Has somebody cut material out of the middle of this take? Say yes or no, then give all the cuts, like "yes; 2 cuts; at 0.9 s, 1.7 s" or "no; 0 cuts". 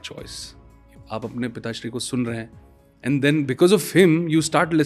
yes; 1 cut; at 0.9 s